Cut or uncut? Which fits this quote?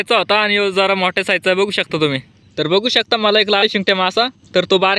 cut